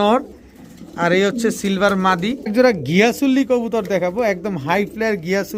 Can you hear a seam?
yes; 1 cut; at 2.5 s

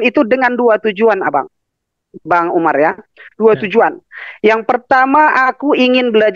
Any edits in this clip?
no; 0 cuts

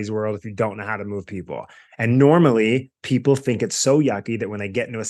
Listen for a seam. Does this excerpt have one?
no; 0 cuts

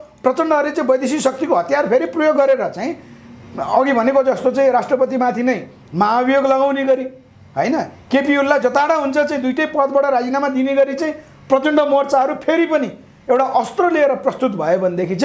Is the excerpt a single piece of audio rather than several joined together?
yes; 0 cuts

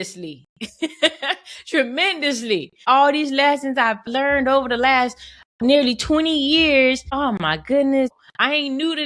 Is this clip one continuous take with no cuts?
no; 5 cuts; at 2.8 s, 4.0 s, 5.6 s, 7.3 s, 8.1 s

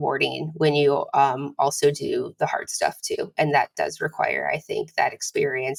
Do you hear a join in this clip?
no; 0 cuts

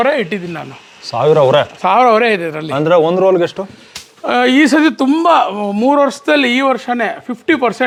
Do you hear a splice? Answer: no; 0 cuts

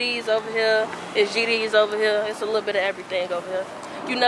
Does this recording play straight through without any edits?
yes; 0 cuts

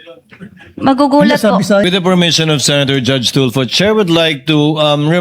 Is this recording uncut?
no; 1 cut; at 1.8 s

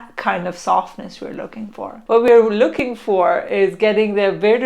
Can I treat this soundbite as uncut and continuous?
no; 1 cut; at 1.9 s

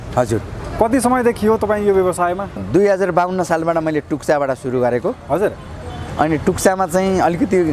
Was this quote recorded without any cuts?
no; 1 cut; at 2.6 s

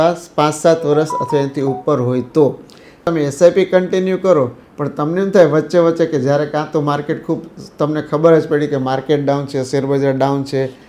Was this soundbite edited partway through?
yes; 1 cut; at 3.1 s

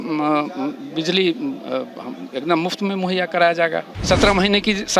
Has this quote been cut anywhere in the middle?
yes; 1 cut; at 3.9 s

